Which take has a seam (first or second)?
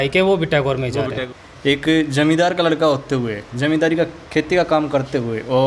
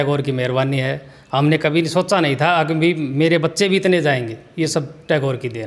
first